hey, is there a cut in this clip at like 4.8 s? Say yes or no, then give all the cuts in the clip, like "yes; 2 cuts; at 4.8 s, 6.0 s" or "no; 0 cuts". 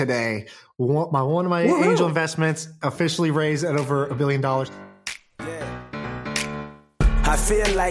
yes; 1 cut; at 4.8 s